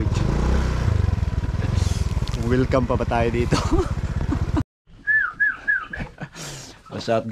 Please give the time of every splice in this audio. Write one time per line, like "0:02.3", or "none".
0:04.7